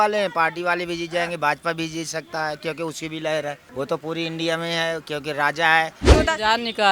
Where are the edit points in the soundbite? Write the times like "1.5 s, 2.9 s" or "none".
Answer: 3.6 s, 6.1 s